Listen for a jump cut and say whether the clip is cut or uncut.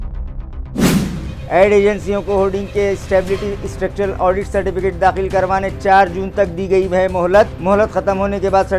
cut